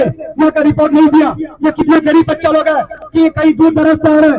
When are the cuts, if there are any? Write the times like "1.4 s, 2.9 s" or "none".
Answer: none

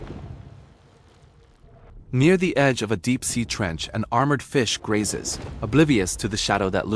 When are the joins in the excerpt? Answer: 1.6 s

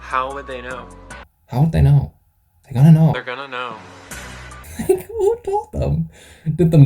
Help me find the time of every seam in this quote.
none

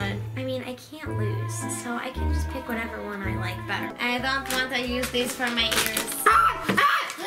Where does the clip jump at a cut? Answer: 3.9 s

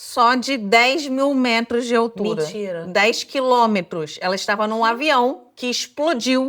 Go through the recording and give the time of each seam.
5.5 s

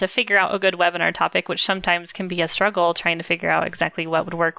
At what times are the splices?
none

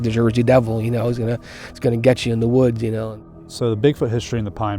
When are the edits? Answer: 3.1 s

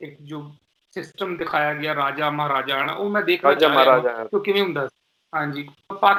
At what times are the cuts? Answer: none

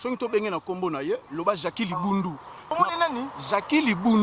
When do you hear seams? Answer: 2.7 s

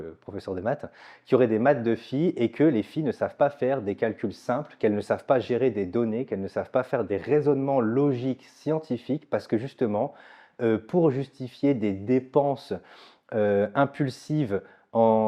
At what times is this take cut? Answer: none

